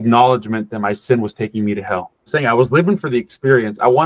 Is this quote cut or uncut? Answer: cut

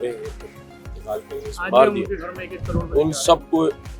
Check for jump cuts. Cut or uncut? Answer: uncut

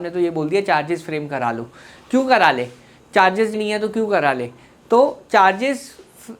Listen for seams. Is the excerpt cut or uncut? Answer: cut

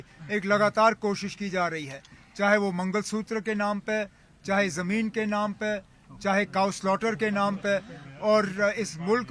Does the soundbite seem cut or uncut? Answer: uncut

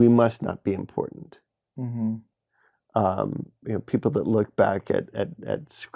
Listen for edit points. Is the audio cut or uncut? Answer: uncut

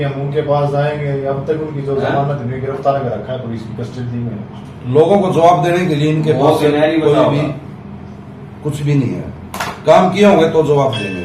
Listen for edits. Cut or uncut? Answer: uncut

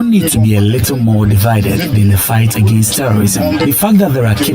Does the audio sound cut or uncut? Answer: cut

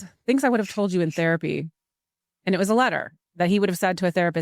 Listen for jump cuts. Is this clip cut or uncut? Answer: uncut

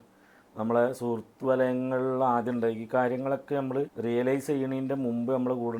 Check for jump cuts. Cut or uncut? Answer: cut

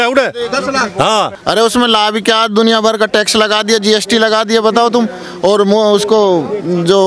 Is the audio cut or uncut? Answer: cut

